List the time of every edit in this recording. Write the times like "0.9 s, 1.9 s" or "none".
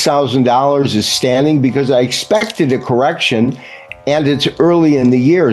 none